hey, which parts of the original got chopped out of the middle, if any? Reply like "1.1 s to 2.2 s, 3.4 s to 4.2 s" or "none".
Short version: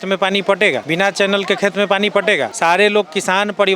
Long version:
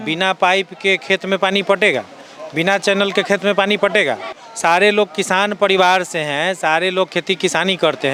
2.0 s to 2.5 s, 4.2 s to 4.5 s